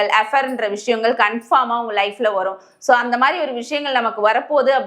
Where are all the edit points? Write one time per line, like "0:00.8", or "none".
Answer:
none